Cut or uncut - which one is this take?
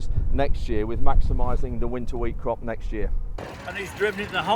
cut